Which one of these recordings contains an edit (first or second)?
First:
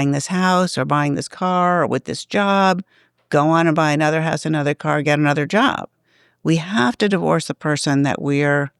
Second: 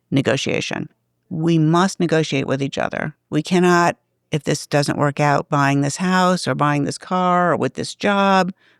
second